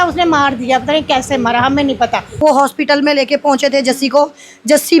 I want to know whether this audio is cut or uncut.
cut